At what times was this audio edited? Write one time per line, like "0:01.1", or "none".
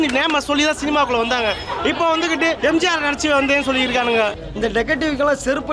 0:02.6
0:04.3